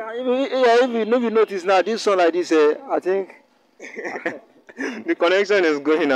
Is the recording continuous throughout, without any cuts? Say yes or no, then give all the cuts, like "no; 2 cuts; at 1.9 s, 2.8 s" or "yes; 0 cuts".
yes; 0 cuts